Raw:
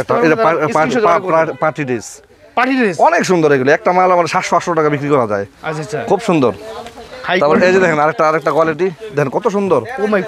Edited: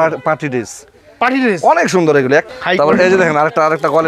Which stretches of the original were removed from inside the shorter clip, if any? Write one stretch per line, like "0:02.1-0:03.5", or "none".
0:03.8-0:07.1